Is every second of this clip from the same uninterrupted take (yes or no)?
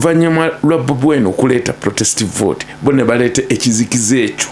yes